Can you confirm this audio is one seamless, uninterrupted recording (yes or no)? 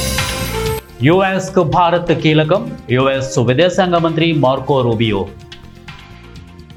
yes